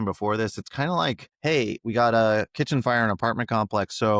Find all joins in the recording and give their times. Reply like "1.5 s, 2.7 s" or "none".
1.3 s